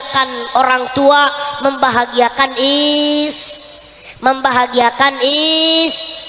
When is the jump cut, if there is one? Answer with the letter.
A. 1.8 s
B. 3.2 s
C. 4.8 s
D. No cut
D